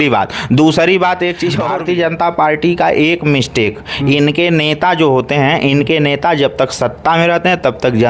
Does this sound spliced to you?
yes; 1 cut; at 1.6 s

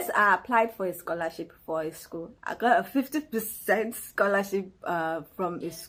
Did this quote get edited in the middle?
no; 0 cuts

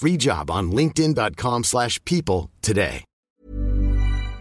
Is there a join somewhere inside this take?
yes; 1 cut; at 3.1 s

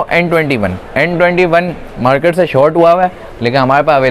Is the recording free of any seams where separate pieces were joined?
yes; 0 cuts

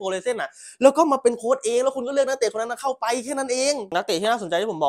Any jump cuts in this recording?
yes; 1 cut; at 3.9 s

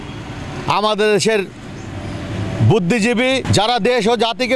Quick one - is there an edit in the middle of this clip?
yes; 1 cut; at 3.5 s

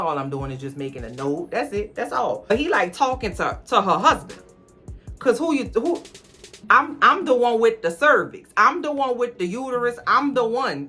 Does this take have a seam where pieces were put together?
yes; 1 cut; at 2.4 s

